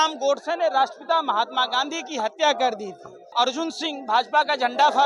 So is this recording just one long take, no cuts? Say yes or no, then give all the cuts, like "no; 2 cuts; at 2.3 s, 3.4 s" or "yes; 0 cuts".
no; 1 cut; at 3.2 s